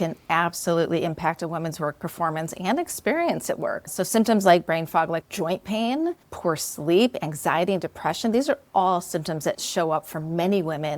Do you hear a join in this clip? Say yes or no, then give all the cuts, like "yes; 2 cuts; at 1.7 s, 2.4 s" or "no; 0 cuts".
yes; 4 cuts; at 3.8 s, 5.2 s, 6.3 s, 9.6 s